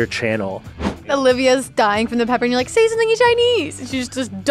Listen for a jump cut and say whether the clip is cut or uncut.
cut